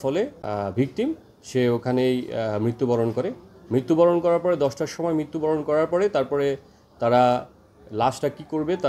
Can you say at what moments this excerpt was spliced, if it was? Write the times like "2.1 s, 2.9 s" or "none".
none